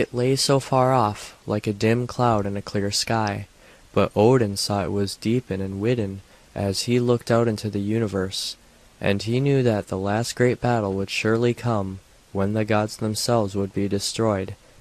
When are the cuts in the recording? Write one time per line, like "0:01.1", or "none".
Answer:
none

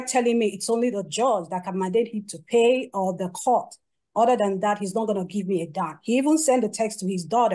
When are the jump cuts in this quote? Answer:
none

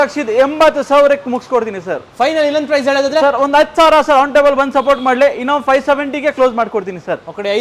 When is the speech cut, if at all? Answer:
none

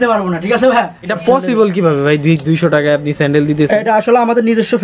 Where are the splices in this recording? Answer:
0:01.1

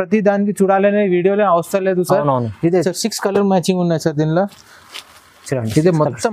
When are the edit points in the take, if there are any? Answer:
0:02.9

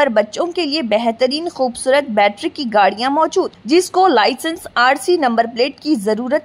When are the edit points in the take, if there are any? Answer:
none

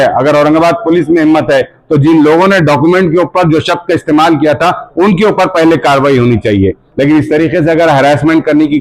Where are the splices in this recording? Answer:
0:06.9

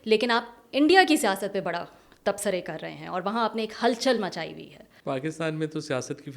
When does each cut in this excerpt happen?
0:04.9

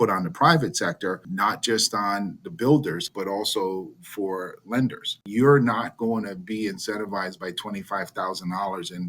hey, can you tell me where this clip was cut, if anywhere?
0:01.3
0:03.1
0:05.1

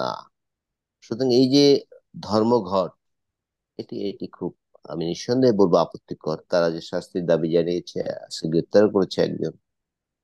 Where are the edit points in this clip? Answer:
none

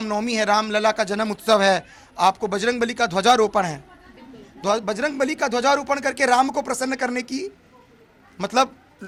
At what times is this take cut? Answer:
none

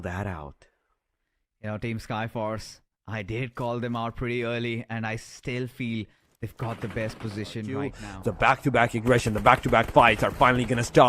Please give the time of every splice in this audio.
0:08.1

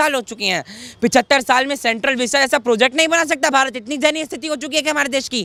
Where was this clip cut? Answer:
none

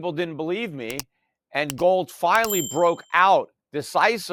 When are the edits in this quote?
none

